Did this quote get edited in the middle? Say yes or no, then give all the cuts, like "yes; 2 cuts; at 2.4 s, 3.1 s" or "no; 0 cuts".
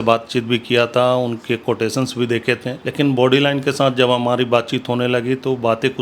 yes; 1 cut; at 2.8 s